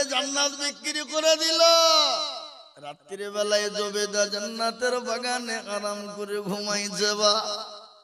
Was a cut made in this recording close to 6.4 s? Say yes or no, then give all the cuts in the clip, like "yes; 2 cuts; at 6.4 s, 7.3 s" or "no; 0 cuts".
no; 0 cuts